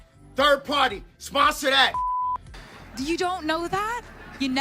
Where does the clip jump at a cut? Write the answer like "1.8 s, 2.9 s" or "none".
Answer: 2.5 s